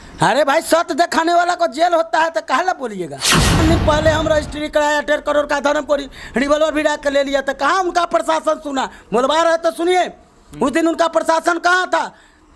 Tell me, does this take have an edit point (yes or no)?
yes